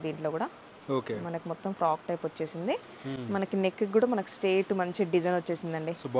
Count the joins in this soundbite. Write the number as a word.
zero